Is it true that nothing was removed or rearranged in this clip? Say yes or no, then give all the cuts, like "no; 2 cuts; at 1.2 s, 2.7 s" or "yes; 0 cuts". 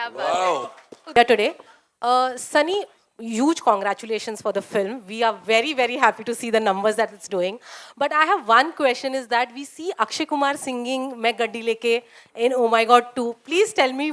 no; 1 cut; at 1.1 s